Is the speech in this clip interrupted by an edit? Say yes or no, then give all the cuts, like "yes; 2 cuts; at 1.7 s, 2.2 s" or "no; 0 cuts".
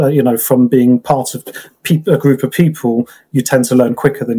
no; 0 cuts